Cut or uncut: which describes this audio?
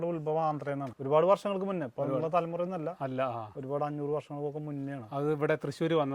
cut